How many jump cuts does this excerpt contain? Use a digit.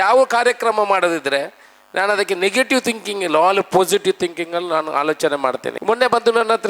1